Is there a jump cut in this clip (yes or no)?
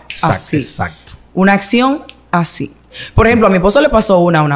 yes